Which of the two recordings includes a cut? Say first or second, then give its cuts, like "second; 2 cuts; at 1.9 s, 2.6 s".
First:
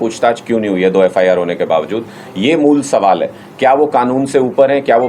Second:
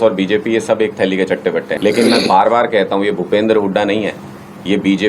second; 1 cut; at 1.7 s